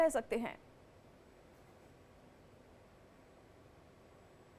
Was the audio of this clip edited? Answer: no; 0 cuts

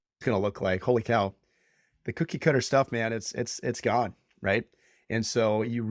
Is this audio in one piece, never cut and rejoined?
yes; 0 cuts

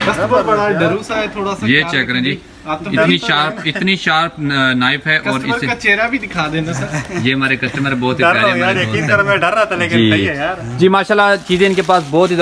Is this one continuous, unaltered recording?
yes; 0 cuts

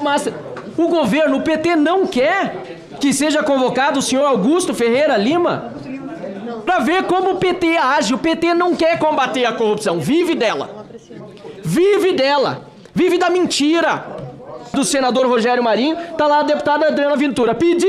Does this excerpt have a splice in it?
yes; 2 cuts; at 6.6 s, 14.7 s

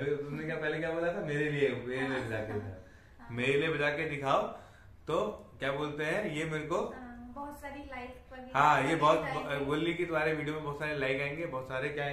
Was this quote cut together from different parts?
no; 0 cuts

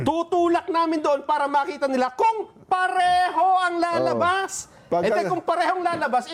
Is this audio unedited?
yes; 0 cuts

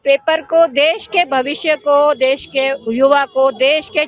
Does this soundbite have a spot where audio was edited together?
no; 0 cuts

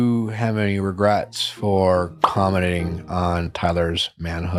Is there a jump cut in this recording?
no; 0 cuts

